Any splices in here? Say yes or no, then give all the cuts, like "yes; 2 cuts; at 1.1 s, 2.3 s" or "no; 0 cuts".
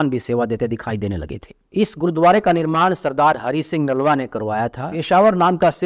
yes; 1 cut; at 4.9 s